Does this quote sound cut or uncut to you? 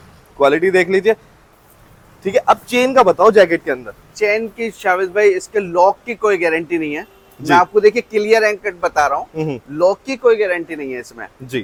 uncut